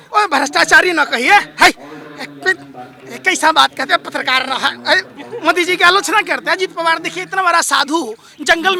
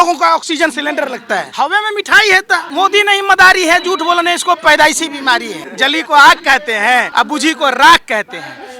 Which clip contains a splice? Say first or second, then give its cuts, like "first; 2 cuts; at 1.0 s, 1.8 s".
second; 4 cuts; at 1.5 s, 2.7 s, 5.6 s, 7.1 s